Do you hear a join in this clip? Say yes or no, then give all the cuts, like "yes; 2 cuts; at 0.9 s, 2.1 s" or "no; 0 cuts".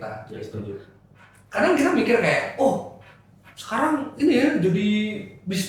no; 0 cuts